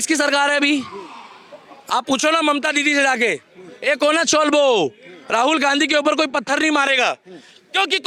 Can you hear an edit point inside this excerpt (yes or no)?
no